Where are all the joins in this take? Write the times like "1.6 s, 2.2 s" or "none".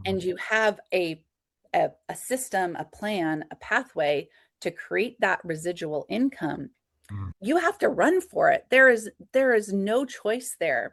none